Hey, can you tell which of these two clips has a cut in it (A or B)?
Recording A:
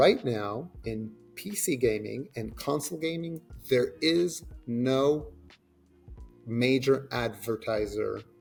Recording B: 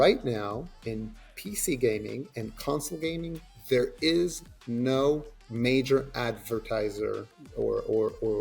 B